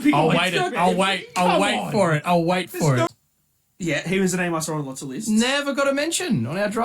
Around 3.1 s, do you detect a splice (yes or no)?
yes